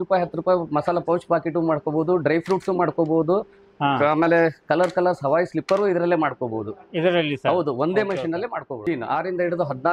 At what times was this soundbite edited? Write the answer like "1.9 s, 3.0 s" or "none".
8.8 s